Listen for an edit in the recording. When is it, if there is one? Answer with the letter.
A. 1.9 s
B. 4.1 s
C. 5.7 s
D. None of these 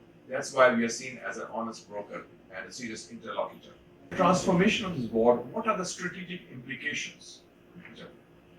B